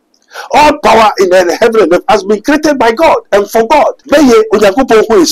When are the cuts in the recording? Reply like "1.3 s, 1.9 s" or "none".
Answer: 4.0 s